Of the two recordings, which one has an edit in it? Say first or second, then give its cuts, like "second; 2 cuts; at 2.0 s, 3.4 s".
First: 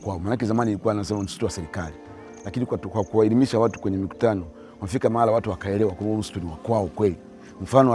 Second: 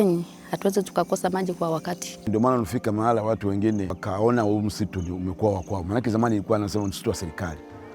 second; 2 cuts; at 2.1 s, 4.0 s